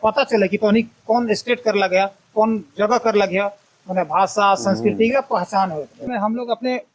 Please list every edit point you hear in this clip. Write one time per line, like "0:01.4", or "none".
0:06.0